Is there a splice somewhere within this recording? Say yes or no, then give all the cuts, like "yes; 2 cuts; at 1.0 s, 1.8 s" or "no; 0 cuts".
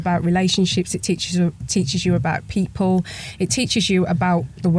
no; 0 cuts